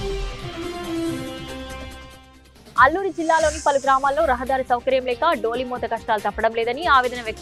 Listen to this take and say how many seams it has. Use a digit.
0